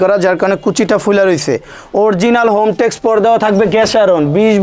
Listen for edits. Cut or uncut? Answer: uncut